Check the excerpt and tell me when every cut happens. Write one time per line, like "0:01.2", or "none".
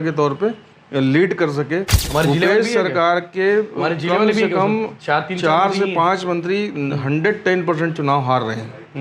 0:02.0